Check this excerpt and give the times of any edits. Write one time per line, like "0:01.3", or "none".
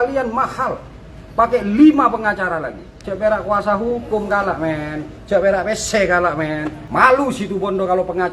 0:03.0
0:06.8